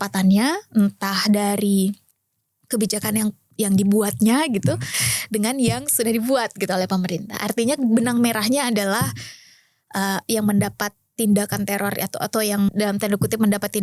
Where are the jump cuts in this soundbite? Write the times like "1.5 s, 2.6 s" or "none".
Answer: 12.7 s